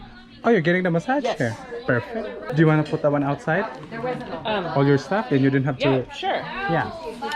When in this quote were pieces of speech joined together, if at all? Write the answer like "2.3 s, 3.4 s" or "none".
2.4 s